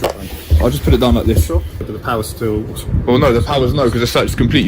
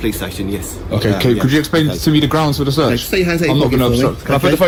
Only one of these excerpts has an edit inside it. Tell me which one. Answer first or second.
first